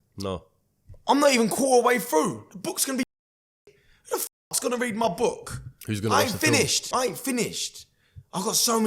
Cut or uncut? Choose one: cut